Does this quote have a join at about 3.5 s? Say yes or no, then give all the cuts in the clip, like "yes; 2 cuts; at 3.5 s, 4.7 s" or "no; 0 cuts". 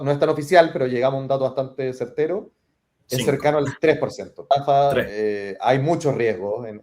no; 1 cut; at 4.8 s